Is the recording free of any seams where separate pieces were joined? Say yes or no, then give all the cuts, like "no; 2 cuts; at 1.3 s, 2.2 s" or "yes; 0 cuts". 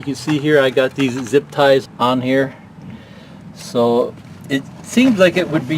no; 1 cut; at 1.8 s